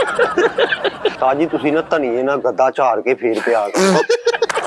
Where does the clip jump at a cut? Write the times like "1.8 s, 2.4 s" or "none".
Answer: 1.2 s